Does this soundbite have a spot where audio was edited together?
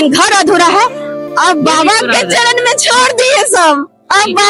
no; 0 cuts

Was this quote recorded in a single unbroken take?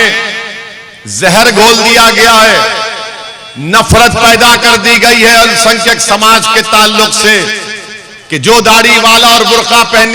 yes; 0 cuts

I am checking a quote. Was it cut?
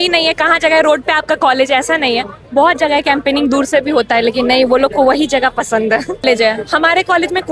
yes; 1 cut; at 6.2 s

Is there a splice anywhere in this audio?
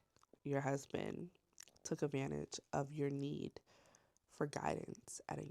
no; 0 cuts

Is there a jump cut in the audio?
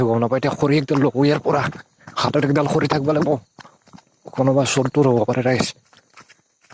no; 0 cuts

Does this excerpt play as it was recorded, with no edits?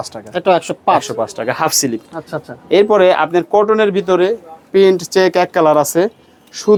yes; 0 cuts

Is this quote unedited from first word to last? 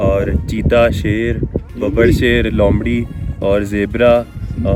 yes; 0 cuts

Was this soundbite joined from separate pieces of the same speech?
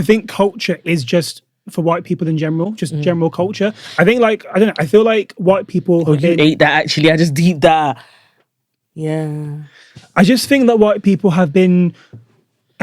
no; 0 cuts

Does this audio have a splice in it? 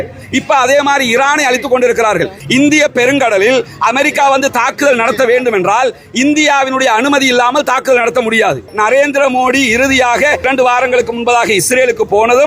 yes; 3 cuts; at 2.4 s, 8.7 s, 10.4 s

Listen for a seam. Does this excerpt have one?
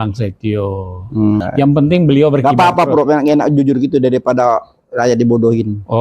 yes; 1 cut; at 1.4 s

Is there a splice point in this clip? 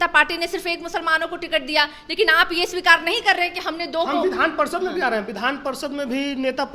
no; 0 cuts

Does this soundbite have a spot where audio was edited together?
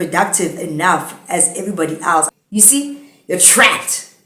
yes; 1 cut; at 2.3 s

